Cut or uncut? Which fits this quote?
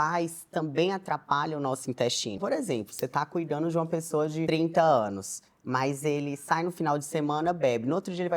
cut